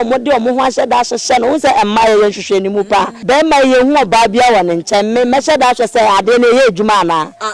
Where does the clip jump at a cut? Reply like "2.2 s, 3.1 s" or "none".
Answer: 3.1 s